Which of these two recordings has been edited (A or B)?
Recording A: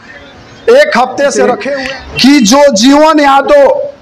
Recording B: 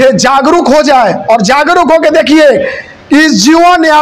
A